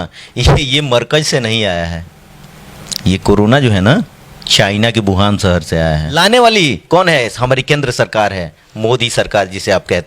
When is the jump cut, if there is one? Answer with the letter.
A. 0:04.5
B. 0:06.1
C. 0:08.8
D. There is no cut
B